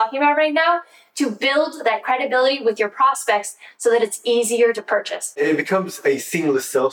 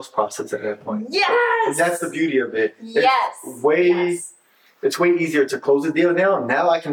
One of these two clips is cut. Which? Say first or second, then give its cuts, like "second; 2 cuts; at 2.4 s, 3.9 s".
first; 1 cut; at 5.4 s